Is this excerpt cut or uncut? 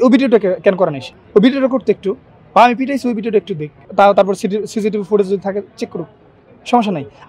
uncut